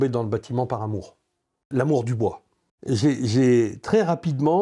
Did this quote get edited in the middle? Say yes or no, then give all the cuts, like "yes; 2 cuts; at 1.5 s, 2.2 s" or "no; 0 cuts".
yes; 2 cuts; at 1.6 s, 2.7 s